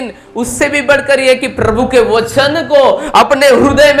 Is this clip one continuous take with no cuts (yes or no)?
yes